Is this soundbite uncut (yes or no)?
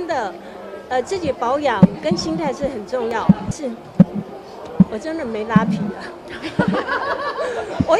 no